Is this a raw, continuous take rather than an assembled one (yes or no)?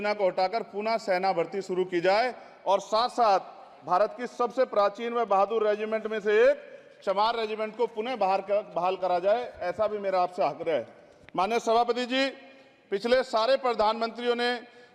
yes